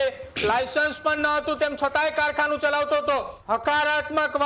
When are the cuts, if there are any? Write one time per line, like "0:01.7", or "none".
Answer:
0:03.3